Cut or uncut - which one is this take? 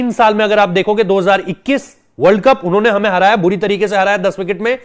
uncut